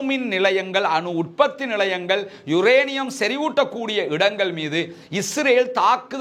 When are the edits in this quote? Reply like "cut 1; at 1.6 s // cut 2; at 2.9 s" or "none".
none